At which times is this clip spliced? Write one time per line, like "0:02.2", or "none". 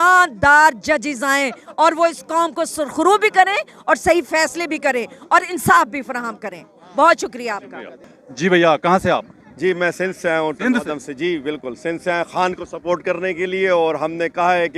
none